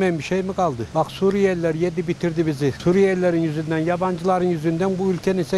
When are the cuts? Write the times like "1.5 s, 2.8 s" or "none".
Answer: 0.8 s, 2.8 s